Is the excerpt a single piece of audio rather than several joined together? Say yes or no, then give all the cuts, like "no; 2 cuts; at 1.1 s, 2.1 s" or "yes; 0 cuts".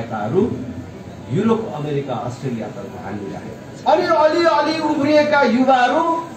yes; 0 cuts